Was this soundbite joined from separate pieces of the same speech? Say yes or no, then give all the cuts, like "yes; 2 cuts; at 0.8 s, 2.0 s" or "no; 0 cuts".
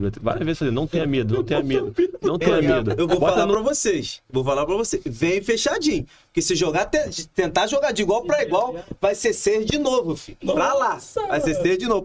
yes; 1 cut; at 3.1 s